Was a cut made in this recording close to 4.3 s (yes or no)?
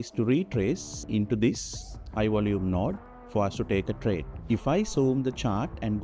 yes